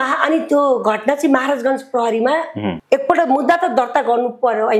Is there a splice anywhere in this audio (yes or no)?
yes